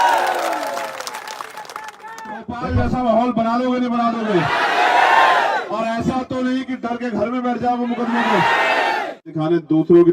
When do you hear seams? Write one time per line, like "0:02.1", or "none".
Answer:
0:02.5
0:09.3

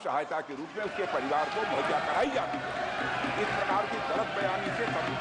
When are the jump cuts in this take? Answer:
none

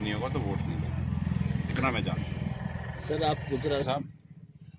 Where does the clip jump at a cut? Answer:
none

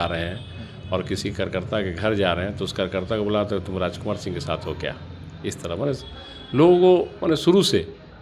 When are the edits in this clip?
none

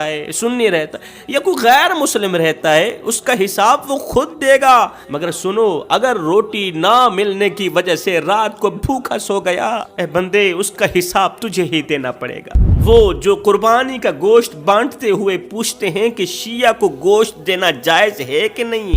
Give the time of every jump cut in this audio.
0:05.0
0:09.9
0:12.6

